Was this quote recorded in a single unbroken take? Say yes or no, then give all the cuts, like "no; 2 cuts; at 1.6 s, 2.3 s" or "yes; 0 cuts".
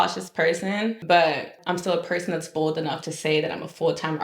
no; 2 cuts; at 1.0 s, 1.6 s